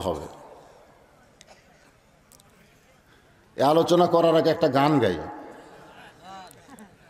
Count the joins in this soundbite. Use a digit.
0